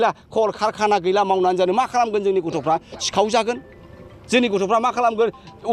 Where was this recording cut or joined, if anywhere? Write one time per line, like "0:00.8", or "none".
none